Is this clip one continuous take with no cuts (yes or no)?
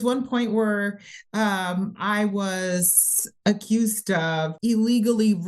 no